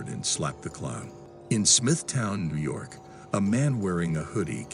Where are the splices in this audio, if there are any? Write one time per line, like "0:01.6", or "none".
0:01.3